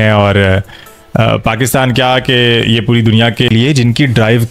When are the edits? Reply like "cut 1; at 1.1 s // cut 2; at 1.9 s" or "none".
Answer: cut 1; at 3.5 s